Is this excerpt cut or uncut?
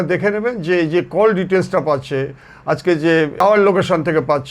cut